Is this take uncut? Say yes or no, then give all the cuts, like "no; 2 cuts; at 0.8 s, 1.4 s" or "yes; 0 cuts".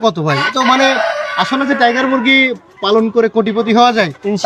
yes; 0 cuts